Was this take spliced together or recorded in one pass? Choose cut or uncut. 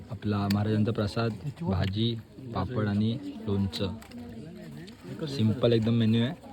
uncut